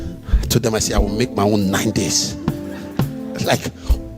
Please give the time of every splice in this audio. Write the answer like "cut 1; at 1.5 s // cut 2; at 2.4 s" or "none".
cut 1; at 2.8 s